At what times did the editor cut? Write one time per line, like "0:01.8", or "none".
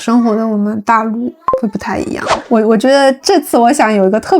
0:02.5